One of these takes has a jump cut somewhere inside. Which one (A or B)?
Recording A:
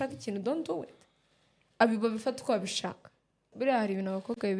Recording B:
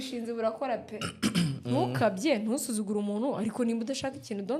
A